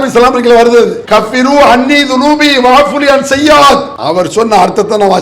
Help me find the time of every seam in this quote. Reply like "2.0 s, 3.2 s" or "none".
1.0 s, 4.0 s